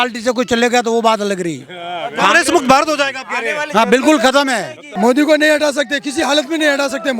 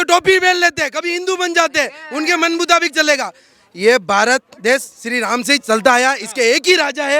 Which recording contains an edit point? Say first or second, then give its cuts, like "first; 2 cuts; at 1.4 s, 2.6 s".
first; 1 cut; at 4.8 s